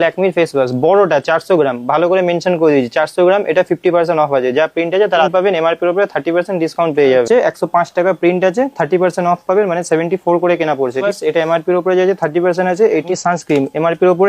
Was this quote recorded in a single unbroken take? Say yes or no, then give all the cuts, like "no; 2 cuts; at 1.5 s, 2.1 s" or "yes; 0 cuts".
no; 4 cuts; at 5.3 s, 7.3 s, 11.0 s, 13.1 s